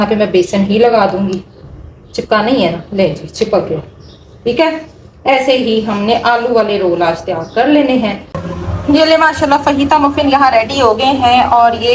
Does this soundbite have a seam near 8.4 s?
yes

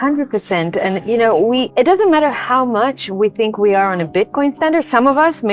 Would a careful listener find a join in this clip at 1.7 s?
yes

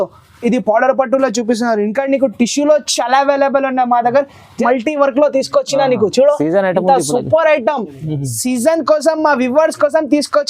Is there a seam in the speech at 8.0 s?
no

